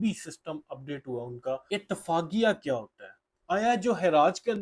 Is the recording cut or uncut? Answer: cut